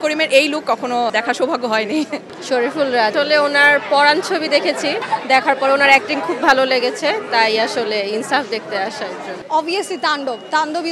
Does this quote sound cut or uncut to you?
cut